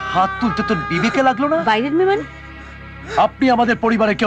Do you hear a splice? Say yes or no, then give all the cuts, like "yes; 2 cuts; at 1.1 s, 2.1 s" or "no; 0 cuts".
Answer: no; 0 cuts